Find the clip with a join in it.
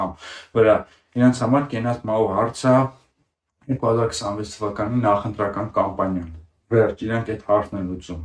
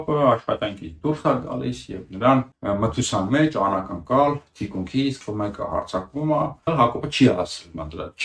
second; 3 cuts; at 2.5 s, 5.2 s, 6.7 s

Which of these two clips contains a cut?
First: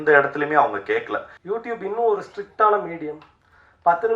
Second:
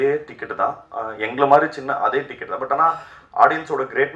first; 1 cut; at 1.3 s

